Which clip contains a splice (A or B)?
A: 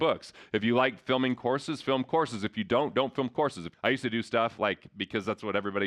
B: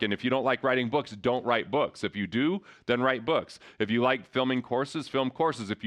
A